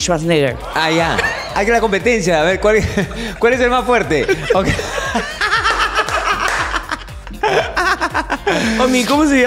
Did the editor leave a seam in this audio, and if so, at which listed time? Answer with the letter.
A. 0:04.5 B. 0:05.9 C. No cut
C